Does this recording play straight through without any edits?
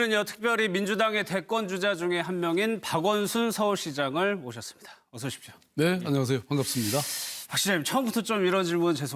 yes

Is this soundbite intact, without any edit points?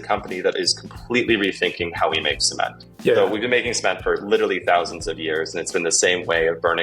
no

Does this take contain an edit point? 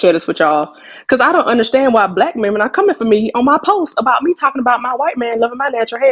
no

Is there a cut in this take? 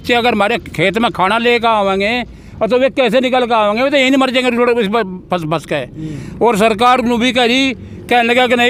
no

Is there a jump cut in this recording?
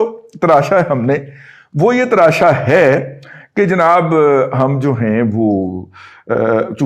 no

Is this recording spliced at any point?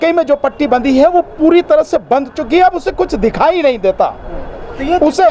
no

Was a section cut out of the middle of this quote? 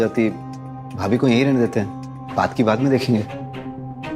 no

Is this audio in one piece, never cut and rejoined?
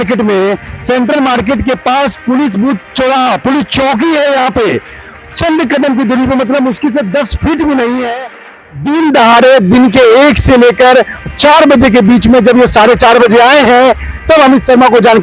yes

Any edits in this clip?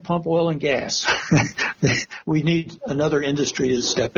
yes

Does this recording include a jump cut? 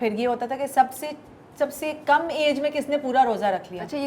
no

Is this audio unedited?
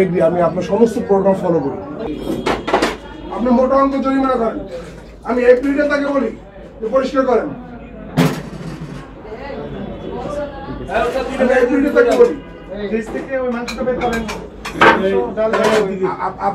no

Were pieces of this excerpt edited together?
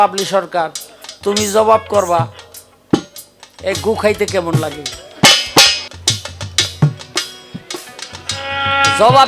yes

